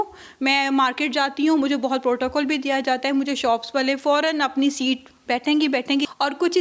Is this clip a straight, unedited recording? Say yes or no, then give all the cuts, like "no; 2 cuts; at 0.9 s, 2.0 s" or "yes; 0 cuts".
yes; 0 cuts